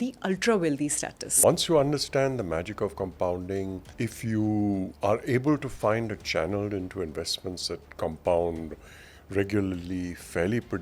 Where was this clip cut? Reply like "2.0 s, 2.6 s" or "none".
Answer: 1.2 s, 3.8 s, 4.9 s